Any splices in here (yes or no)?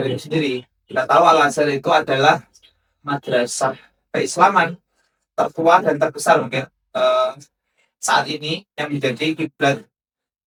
no